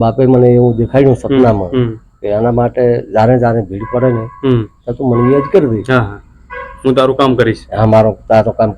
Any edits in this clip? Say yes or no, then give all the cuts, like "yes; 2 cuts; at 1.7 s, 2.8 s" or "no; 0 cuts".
no; 0 cuts